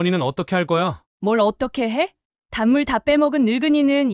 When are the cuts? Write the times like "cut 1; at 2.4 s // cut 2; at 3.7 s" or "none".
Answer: cut 1; at 1.0 s